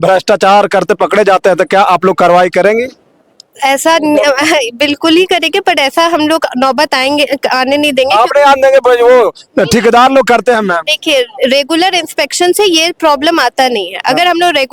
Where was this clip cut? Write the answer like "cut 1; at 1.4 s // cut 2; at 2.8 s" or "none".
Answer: none